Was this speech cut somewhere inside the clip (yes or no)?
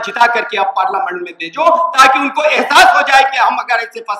no